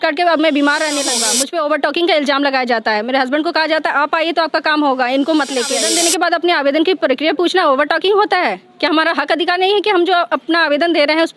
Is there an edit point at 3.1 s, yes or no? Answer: no